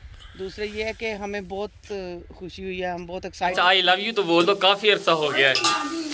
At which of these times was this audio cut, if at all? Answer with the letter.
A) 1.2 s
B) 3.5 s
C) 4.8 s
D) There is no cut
B